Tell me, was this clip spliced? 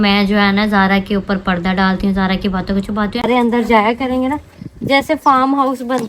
yes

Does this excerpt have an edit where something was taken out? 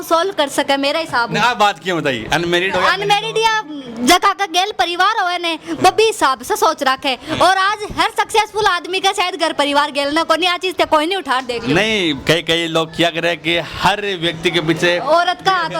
no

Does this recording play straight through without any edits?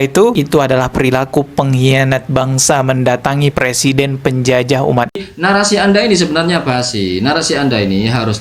no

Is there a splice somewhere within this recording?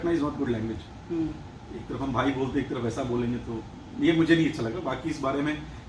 no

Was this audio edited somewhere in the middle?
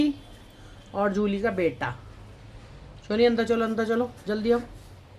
no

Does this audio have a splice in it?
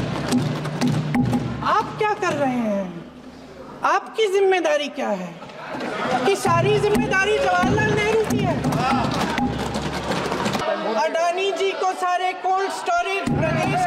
yes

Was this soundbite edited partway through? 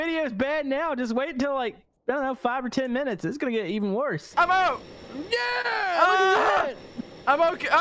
yes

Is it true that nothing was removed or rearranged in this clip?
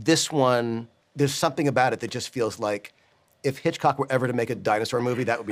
yes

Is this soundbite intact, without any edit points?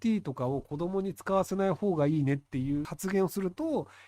no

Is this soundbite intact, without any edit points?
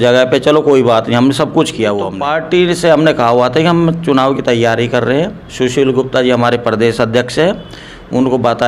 no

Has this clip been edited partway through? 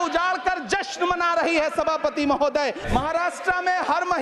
yes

